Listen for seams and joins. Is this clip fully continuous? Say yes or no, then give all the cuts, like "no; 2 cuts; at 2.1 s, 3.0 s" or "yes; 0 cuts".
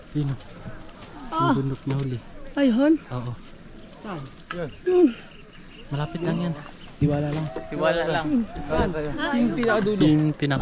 yes; 0 cuts